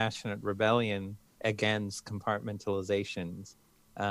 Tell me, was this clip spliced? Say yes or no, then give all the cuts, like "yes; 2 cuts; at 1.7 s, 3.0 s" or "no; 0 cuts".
yes; 1 cut; at 1.2 s